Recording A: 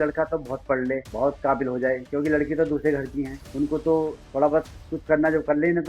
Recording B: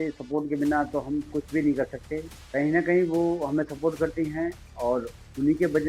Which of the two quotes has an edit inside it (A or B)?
A